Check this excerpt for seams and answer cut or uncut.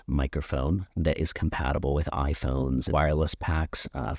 cut